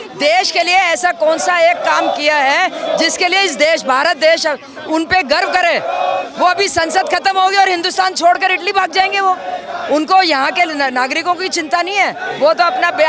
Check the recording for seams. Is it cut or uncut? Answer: uncut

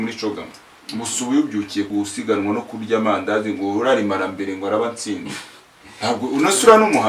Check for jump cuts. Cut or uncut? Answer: cut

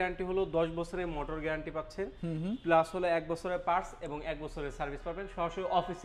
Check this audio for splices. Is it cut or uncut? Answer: uncut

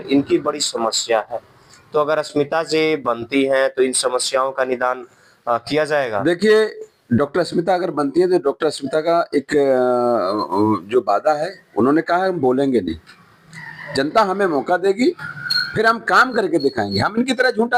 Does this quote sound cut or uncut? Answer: uncut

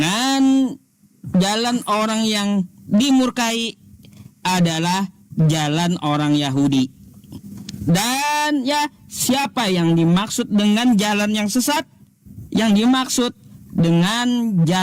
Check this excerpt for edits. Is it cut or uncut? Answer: uncut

